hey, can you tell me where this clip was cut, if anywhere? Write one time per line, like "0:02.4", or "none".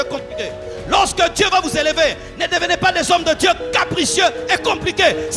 none